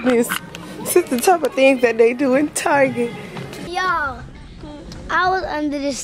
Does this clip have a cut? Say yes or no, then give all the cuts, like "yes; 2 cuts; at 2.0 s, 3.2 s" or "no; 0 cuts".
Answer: yes; 1 cut; at 3.7 s